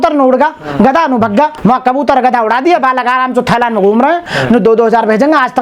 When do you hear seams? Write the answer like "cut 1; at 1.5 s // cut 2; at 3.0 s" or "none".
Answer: cut 1; at 1.6 s // cut 2; at 4.3 s